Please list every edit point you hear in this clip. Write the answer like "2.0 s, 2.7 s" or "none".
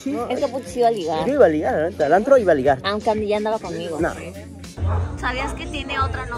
4.8 s